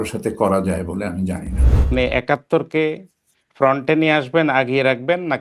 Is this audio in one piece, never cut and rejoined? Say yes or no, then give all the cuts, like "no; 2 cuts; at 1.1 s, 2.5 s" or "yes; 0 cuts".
no; 1 cut; at 1.9 s